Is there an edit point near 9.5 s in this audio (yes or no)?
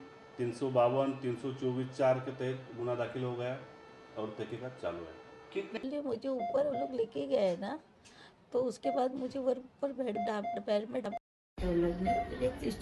no